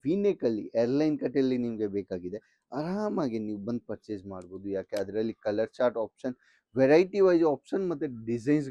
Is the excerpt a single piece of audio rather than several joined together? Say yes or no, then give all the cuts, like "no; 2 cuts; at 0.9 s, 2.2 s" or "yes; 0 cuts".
yes; 0 cuts